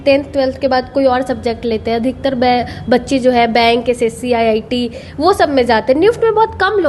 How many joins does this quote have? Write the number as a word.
zero